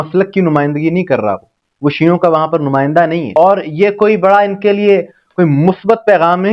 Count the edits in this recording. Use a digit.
1